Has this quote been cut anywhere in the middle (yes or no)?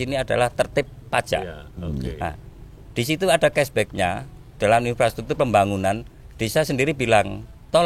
no